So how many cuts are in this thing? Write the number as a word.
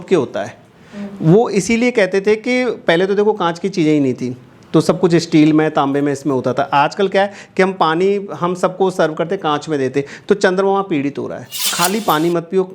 one